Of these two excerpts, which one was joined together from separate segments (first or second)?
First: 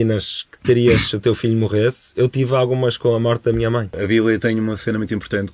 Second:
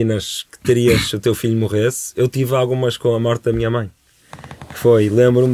first